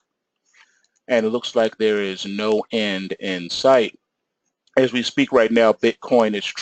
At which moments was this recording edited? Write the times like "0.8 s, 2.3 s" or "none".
2.7 s